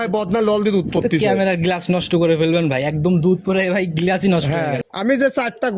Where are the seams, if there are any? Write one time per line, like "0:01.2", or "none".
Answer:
0:04.8